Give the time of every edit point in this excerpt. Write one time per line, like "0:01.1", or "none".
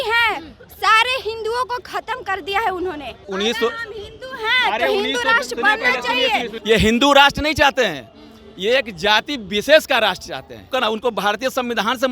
0:03.1
0:06.5
0:10.7